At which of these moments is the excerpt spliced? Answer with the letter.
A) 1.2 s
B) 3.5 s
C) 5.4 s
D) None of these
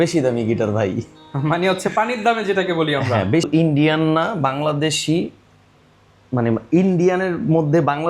B